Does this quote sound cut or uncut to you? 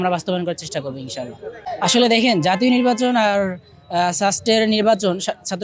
uncut